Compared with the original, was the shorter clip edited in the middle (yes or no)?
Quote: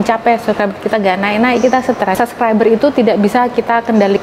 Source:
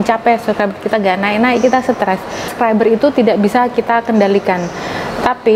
yes